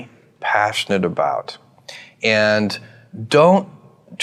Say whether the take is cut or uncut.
uncut